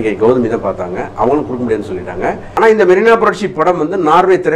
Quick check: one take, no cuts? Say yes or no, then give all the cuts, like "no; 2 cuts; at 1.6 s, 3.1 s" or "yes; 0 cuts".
no; 1 cut; at 2.5 s